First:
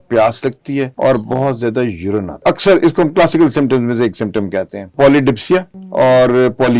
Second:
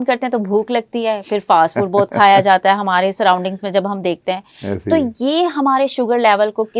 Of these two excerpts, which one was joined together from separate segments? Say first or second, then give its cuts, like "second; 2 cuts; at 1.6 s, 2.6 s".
first; 4 cuts; at 0.9 s, 2.4 s, 4.9 s, 5.8 s